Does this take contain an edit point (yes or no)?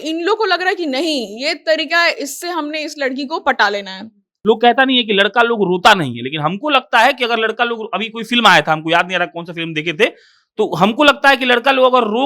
yes